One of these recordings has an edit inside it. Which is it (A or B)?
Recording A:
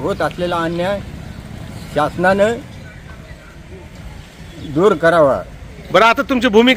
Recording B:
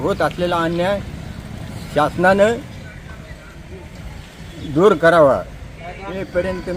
B